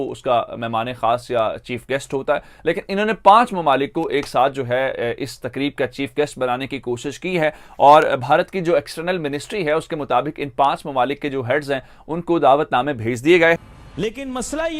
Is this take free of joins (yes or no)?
yes